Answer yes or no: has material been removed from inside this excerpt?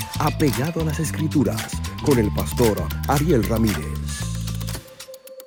no